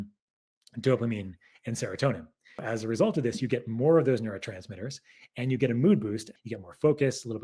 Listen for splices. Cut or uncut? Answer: cut